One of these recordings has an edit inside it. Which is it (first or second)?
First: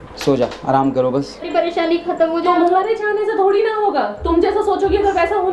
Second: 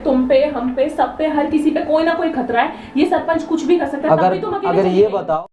first